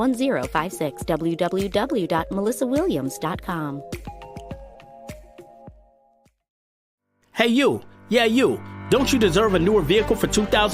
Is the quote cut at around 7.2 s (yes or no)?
yes